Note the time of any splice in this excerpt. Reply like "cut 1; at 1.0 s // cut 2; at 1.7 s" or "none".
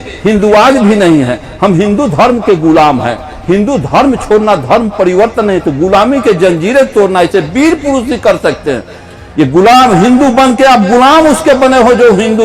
none